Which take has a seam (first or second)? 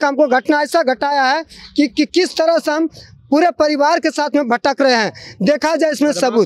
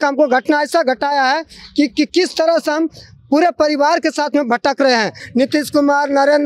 second